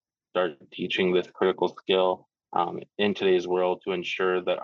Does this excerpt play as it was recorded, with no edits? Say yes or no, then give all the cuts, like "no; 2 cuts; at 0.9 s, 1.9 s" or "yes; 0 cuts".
yes; 0 cuts